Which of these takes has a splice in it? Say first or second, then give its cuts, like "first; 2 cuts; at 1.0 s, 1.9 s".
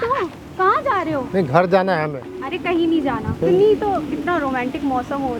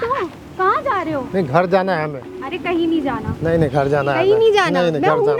first; 1 cut; at 3.4 s